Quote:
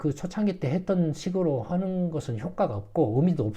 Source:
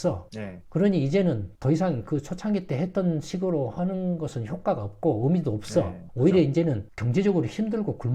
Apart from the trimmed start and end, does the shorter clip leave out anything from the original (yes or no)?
no